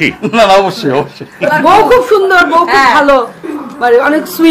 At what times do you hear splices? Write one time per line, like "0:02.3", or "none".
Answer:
0:01.5